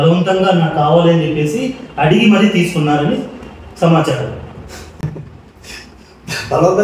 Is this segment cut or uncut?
uncut